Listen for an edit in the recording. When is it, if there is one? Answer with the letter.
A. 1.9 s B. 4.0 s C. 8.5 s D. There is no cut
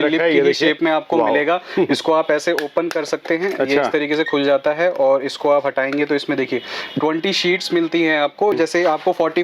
C